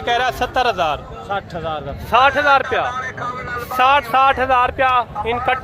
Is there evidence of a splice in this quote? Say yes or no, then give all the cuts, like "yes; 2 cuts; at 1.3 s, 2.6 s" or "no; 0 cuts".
yes; 1 cut; at 1.1 s